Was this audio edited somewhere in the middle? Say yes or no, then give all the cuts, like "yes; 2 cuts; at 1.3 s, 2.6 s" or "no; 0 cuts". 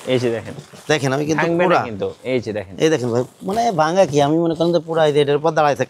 no; 0 cuts